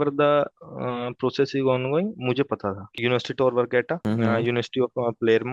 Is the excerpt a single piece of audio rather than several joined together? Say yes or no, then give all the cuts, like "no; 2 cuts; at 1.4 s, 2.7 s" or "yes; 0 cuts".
no; 2 cuts; at 2.9 s, 4.0 s